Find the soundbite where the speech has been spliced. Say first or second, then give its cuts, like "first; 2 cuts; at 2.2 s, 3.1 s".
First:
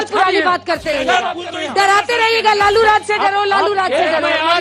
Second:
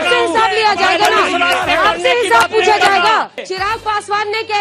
second; 1 cut; at 3.4 s